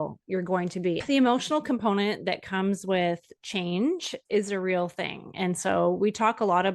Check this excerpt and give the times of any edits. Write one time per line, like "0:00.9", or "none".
0:01.0